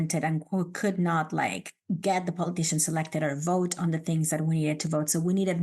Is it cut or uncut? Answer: uncut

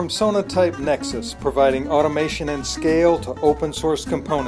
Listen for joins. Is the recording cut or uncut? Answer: uncut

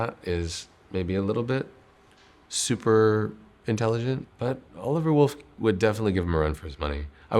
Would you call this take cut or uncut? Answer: cut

